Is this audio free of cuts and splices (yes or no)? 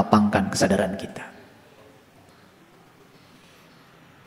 yes